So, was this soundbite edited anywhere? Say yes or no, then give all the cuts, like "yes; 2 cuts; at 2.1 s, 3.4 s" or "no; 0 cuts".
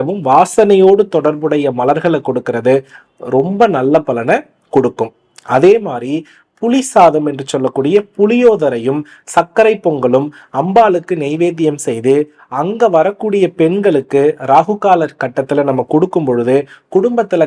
no; 0 cuts